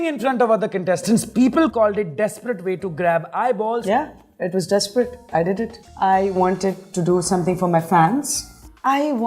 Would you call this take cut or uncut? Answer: cut